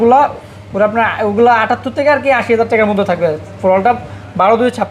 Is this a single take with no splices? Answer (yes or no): yes